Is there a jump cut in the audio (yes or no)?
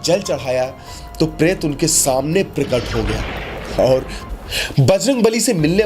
yes